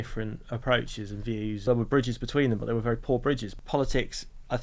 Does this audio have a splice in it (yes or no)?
yes